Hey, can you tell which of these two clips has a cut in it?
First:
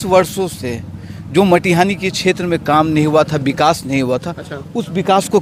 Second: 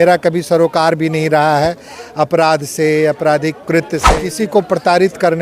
second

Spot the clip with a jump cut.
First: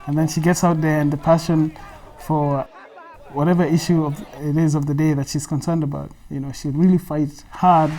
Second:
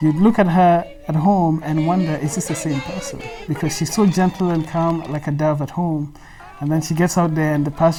first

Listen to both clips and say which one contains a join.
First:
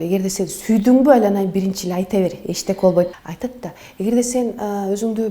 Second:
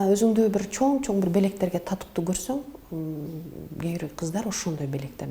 first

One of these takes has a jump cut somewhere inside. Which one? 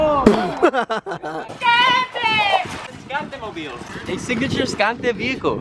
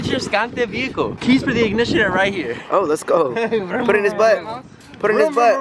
first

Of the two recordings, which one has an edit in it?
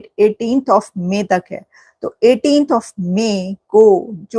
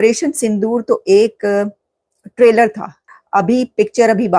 second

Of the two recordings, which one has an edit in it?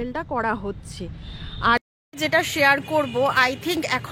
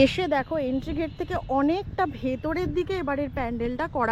first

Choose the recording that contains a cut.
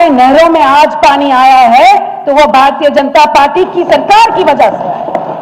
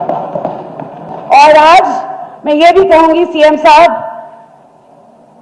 second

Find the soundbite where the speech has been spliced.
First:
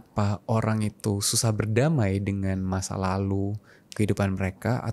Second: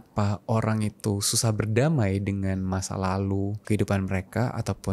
second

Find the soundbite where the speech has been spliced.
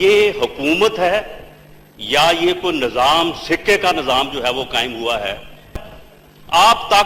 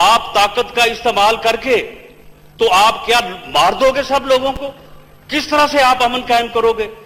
first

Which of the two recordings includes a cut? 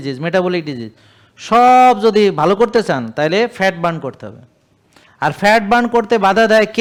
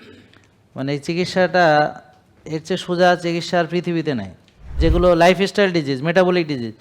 second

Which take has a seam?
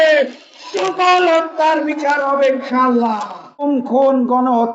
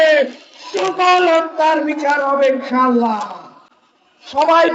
first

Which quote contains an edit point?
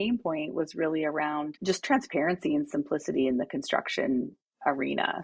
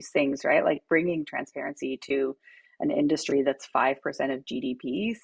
first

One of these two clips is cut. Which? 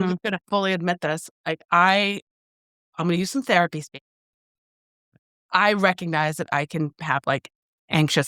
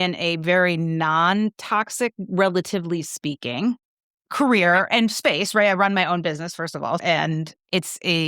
second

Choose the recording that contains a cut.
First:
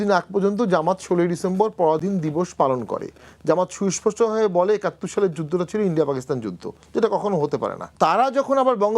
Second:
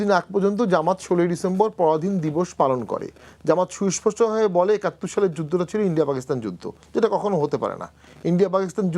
first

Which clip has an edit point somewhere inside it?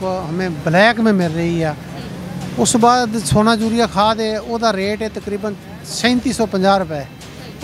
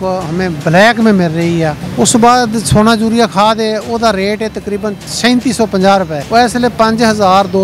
second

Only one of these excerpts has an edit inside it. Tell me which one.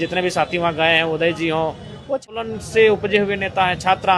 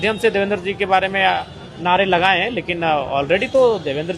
first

